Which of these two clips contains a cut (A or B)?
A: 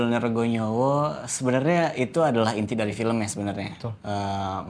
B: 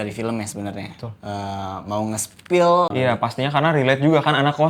B